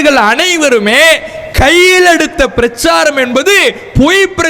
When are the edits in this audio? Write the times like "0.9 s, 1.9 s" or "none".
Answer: none